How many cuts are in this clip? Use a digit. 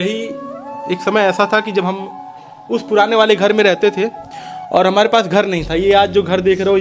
0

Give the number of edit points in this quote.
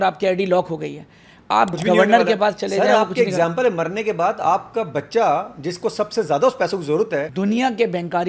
2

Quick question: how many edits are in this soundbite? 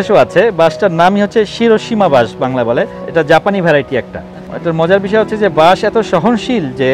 2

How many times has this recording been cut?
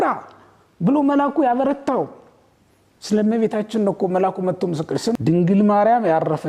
1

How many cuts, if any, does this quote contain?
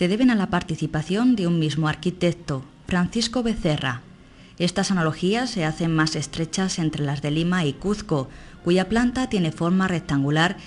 1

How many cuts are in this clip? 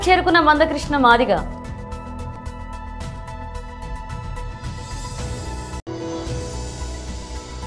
3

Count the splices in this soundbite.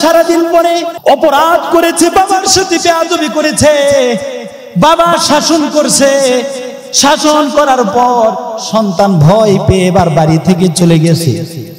1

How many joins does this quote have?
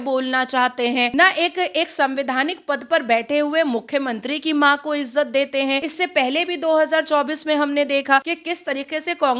3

